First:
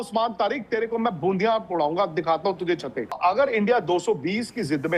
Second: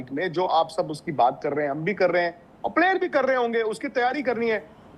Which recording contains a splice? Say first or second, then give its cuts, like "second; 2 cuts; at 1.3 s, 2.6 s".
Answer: first; 1 cut; at 3.2 s